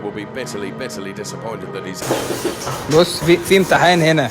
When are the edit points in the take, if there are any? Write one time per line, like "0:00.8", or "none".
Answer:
0:02.0